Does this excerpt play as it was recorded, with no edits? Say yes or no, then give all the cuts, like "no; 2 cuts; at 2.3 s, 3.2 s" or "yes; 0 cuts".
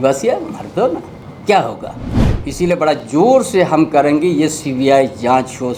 yes; 0 cuts